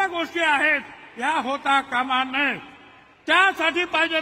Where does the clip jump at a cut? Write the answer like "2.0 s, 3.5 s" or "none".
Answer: none